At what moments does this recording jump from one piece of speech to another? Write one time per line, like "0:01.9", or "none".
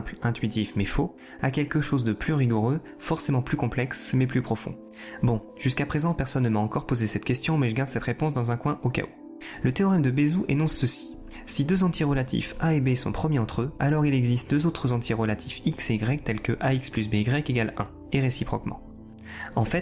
0:04.0